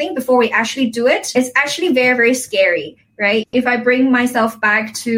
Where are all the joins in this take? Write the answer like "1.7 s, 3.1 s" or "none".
1.3 s, 3.4 s